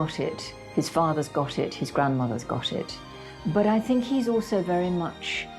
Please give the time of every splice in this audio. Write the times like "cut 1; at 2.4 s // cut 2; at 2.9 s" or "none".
cut 1; at 3.0 s